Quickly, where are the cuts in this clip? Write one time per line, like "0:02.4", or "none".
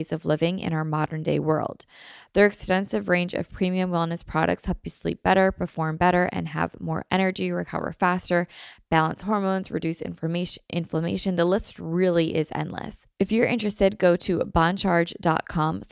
0:13.0